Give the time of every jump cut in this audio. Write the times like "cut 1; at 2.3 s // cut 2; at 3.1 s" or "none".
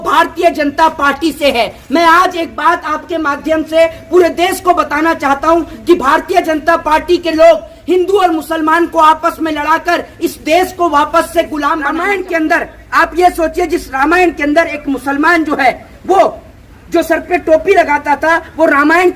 cut 1; at 11.9 s